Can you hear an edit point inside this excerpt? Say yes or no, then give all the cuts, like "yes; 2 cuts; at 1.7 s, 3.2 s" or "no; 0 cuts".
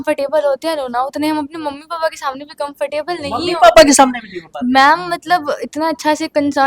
no; 0 cuts